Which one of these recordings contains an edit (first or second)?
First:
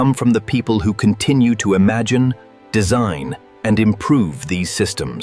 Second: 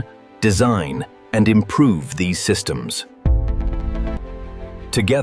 second